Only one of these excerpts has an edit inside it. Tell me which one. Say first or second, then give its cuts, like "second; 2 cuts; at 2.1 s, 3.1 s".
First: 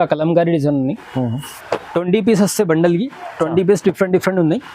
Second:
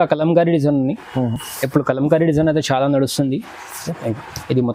first; 1 cut; at 1.5 s